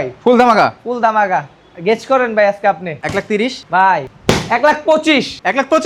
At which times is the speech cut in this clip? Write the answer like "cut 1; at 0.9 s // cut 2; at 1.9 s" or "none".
none